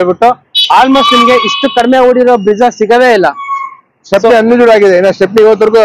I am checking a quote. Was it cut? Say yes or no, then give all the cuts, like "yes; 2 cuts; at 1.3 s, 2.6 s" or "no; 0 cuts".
no; 0 cuts